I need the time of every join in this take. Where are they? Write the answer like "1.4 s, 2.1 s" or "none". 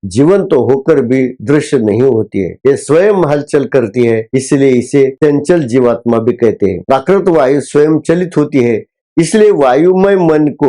6.8 s

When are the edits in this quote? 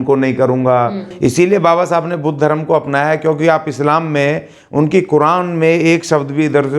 1.0 s

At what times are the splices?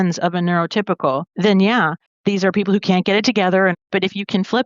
1.3 s, 2.0 s, 3.8 s

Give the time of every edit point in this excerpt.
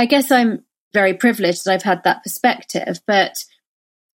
0.9 s

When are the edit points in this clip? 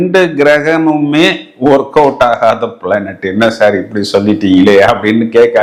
none

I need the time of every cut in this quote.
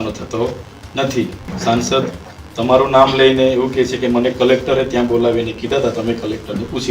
1.5 s

